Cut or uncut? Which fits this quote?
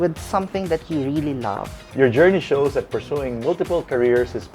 cut